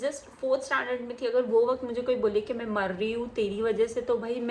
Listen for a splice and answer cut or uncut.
uncut